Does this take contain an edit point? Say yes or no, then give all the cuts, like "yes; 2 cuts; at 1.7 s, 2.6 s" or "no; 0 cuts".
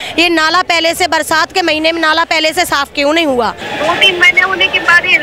yes; 1 cut; at 3.6 s